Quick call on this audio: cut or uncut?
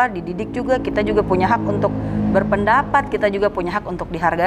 uncut